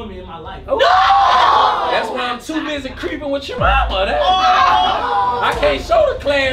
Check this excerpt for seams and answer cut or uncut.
uncut